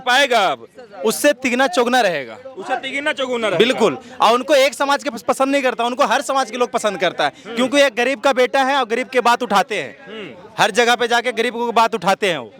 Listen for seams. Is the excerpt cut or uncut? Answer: uncut